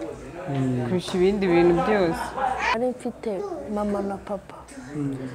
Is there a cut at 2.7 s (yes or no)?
yes